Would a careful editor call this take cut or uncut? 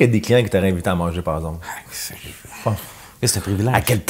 uncut